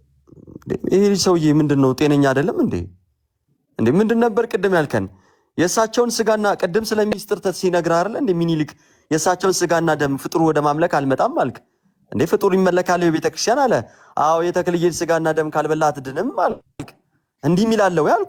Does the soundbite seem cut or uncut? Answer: uncut